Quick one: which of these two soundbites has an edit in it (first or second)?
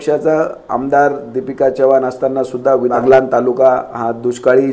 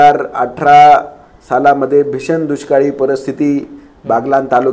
first